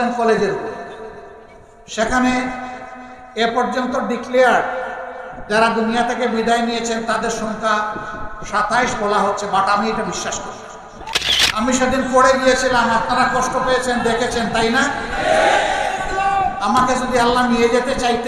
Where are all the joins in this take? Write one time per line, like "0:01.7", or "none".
0:11.1